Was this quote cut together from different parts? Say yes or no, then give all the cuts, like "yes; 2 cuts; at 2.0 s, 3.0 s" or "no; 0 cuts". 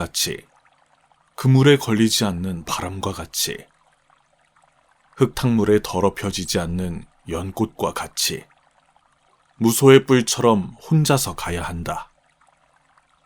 yes; 2 cuts; at 3.7 s, 5.2 s